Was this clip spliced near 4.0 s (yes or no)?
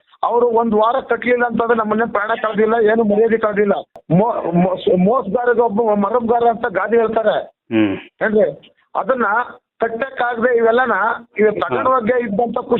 yes